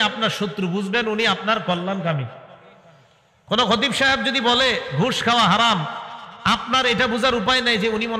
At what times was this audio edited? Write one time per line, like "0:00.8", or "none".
none